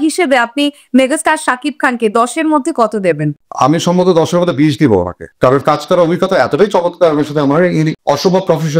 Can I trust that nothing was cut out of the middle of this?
yes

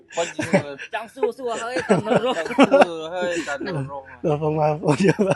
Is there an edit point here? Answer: no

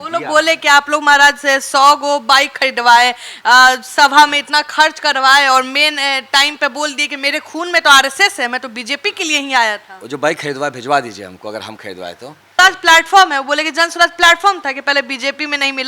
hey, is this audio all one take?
no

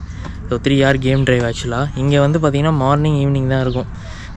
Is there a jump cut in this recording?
no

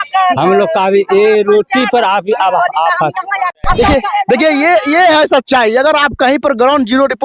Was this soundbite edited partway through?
yes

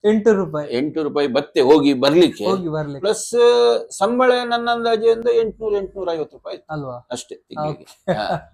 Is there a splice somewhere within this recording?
no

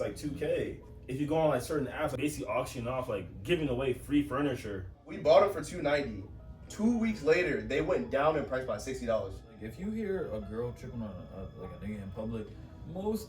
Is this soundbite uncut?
no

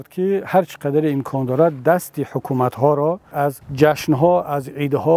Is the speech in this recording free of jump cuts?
no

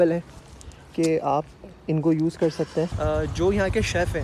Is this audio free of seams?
no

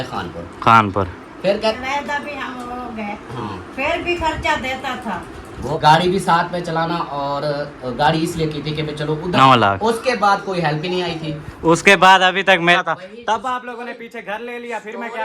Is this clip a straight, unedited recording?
no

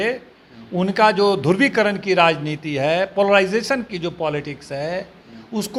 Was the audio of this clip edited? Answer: no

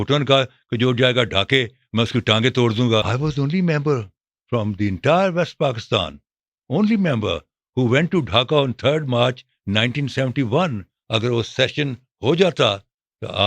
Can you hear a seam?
yes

